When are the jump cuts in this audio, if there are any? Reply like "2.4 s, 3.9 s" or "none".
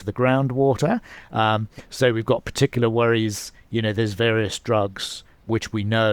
none